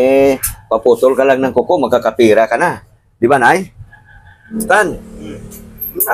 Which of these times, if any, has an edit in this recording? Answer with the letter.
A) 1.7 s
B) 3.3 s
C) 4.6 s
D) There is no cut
C